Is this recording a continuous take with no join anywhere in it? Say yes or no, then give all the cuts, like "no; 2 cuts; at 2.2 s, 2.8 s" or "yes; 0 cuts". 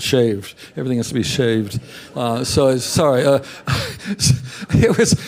no; 1 cut; at 2.2 s